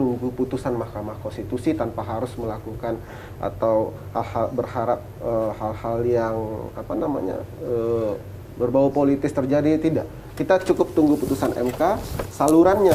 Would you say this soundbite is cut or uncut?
uncut